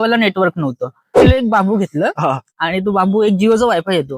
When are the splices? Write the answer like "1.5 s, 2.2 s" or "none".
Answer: 1.2 s